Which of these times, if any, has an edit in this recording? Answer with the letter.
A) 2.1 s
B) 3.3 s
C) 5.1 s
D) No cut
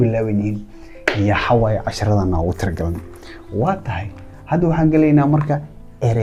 D